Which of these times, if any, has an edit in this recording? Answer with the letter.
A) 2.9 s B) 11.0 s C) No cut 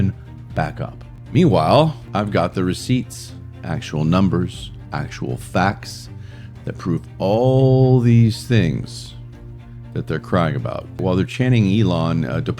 B